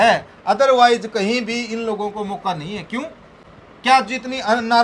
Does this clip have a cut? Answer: no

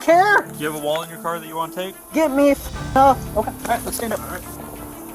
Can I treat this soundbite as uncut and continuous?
yes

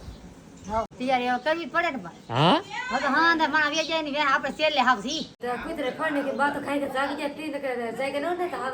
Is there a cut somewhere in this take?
yes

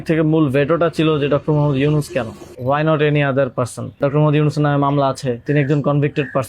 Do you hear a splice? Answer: yes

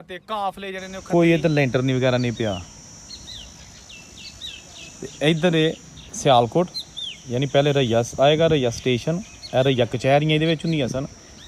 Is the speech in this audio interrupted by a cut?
yes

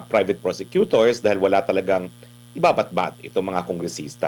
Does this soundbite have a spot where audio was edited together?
no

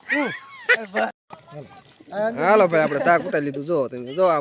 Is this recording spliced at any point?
yes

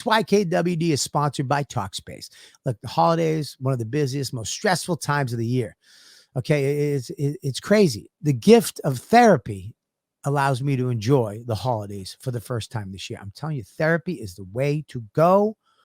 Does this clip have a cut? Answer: yes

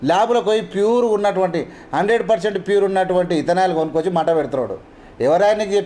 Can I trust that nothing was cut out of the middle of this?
yes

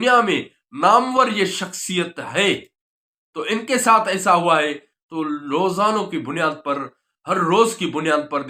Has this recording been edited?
no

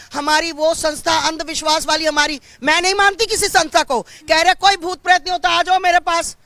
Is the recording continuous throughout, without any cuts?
yes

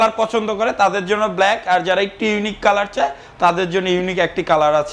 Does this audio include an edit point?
no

